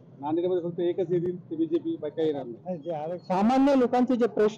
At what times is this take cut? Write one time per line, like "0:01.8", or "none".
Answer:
0:03.1